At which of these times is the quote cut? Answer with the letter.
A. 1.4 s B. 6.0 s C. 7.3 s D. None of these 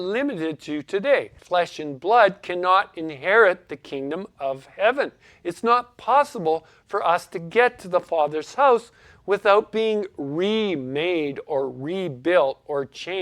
A